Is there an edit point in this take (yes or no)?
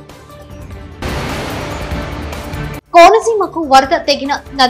no